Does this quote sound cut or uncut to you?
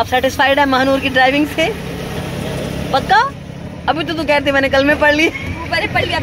uncut